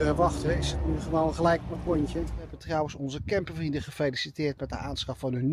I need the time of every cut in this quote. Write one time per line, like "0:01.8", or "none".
0:02.6